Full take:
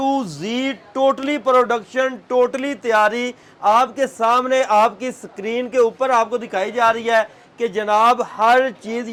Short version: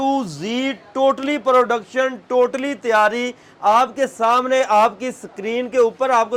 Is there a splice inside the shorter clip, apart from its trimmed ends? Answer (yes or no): no